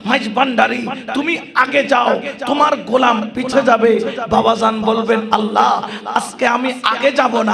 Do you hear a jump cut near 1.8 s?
no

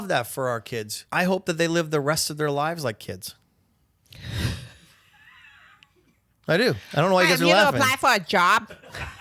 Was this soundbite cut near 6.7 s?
no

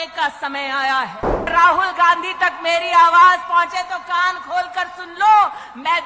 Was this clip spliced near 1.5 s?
yes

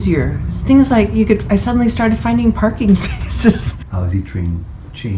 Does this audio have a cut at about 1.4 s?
no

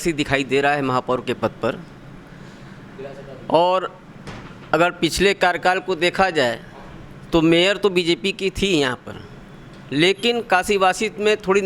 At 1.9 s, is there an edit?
no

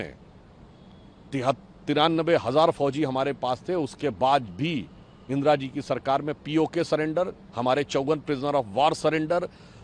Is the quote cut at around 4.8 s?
no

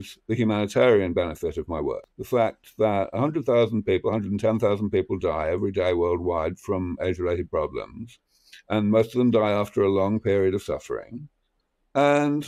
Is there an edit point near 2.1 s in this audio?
yes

